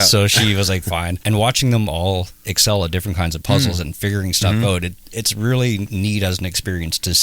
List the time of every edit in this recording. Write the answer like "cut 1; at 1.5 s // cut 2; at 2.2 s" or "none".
cut 1; at 1.2 s // cut 2; at 5.9 s